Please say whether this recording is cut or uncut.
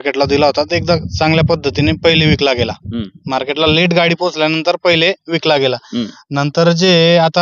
uncut